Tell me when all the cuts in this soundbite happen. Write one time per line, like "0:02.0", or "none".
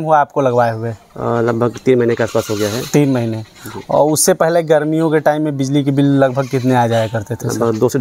none